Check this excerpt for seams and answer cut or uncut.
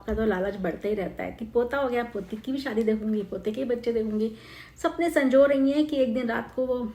uncut